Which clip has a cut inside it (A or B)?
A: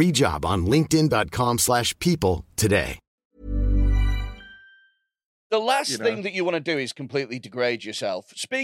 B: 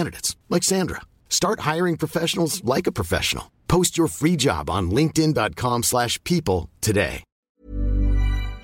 A